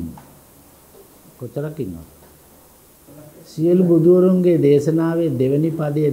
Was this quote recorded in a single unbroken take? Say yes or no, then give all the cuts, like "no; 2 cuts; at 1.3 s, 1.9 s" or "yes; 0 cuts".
no; 1 cut; at 3.1 s